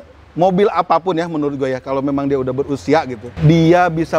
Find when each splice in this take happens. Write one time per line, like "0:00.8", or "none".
0:03.2

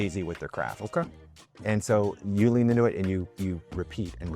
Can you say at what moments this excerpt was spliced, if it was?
0:01.5

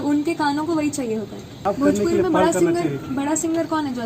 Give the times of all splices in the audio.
0:01.5

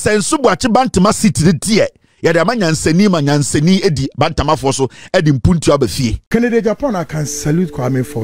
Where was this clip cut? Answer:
0:06.3

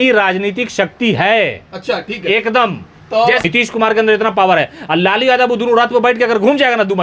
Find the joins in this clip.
0:03.4

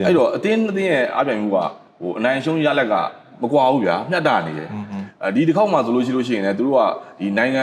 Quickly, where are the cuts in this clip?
none

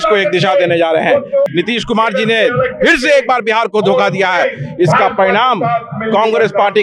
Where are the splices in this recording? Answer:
0:01.5

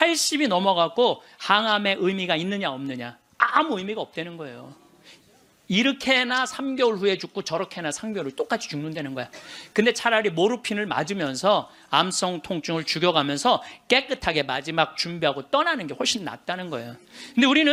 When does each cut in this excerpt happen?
none

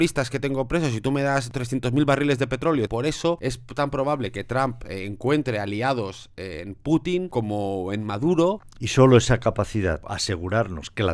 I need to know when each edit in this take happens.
0:01.5
0:03.0
0:07.3
0:08.7
0:10.1

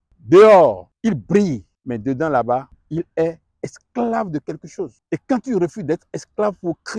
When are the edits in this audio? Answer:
0:00.9
0:01.7
0:02.8
0:05.0

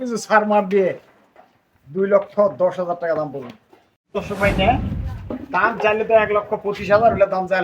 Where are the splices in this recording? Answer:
0:04.1

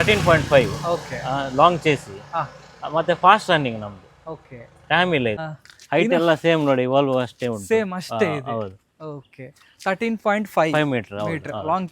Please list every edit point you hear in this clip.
0:05.4

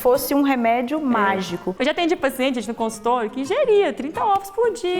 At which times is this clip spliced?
0:01.7

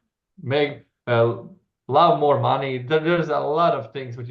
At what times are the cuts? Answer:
none

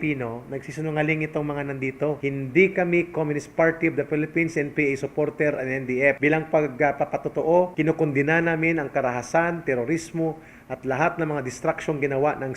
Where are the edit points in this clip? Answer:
0:02.2
0:06.2
0:07.7

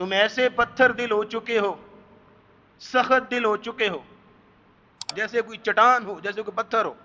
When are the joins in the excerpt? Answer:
0:05.2

